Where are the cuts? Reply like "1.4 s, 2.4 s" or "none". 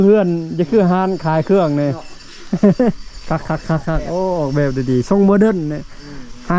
none